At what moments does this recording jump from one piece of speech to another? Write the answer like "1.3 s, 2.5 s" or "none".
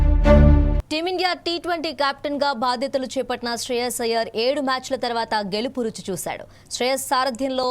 0.9 s